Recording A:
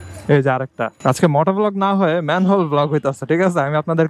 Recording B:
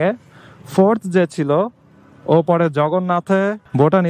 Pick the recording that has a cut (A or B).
A